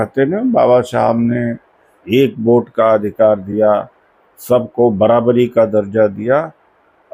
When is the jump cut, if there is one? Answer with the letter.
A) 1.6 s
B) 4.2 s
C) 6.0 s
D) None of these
D